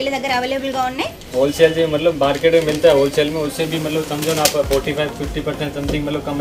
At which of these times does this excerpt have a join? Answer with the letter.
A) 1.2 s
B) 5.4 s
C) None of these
A